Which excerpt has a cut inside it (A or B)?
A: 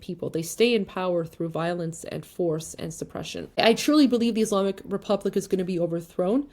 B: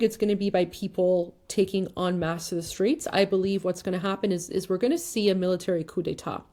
A